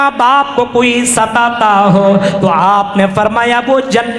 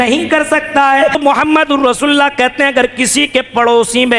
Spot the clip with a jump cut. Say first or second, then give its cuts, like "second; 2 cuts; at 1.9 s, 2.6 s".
second; 1 cut; at 1.2 s